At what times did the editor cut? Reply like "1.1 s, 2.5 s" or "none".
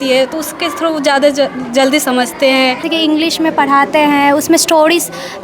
2.9 s